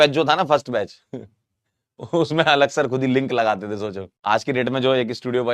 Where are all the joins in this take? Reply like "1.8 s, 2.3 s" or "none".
4.1 s